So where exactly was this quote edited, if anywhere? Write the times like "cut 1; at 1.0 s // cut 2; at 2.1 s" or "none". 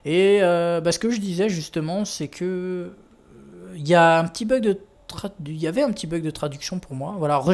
none